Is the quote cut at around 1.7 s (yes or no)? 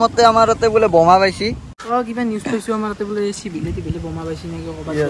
yes